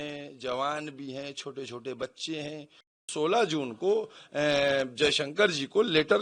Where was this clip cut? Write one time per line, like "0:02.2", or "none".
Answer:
0:03.1